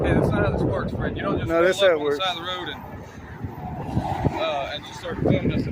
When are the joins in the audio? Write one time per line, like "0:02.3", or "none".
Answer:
none

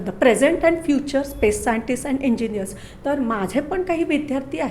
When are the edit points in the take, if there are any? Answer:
none

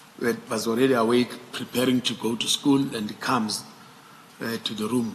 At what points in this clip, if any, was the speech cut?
none

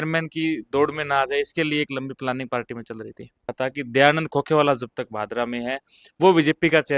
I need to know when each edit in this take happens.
0:03.5

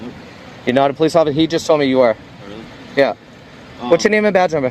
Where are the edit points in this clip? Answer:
none

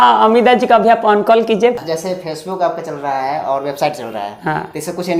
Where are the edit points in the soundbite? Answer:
0:01.8

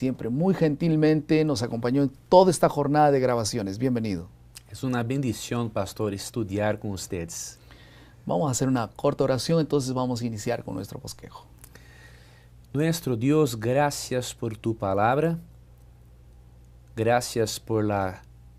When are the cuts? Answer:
0:16.0

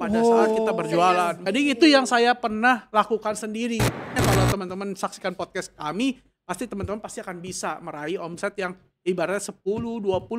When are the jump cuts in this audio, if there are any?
0:01.3
0:04.2

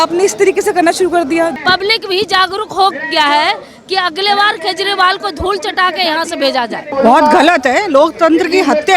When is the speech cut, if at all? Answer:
0:01.5
0:06.9

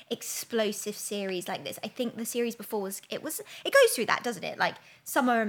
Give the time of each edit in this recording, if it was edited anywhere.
none

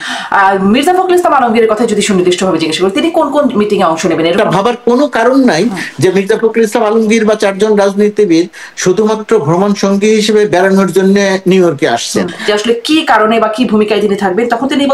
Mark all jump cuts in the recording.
0:04.4
0:12.4

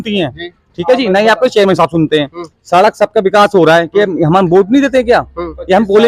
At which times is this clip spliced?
none

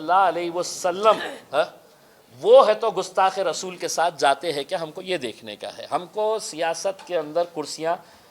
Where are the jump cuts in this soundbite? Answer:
none

